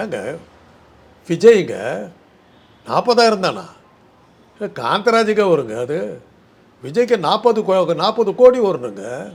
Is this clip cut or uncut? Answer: uncut